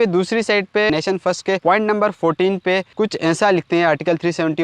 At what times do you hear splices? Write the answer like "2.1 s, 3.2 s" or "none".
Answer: 0.9 s